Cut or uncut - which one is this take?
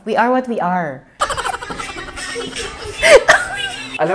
cut